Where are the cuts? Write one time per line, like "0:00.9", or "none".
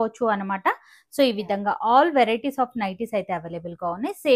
none